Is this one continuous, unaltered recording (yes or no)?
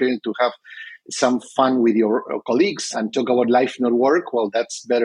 no